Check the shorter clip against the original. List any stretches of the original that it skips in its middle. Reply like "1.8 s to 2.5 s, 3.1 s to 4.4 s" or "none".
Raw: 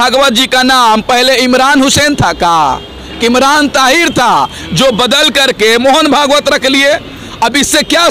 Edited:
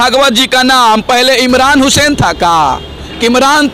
none